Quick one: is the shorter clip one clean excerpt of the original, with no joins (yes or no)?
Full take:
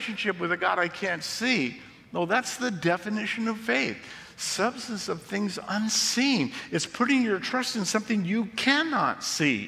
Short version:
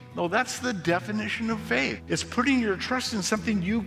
no